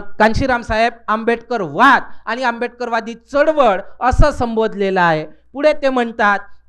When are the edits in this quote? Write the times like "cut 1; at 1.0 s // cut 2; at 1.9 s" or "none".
none